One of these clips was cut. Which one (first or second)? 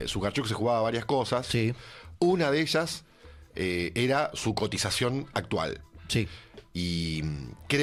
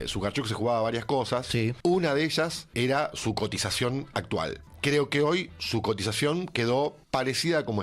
second